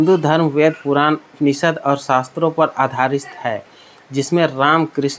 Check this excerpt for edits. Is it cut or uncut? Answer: uncut